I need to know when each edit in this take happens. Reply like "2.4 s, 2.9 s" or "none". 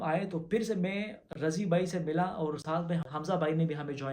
3.1 s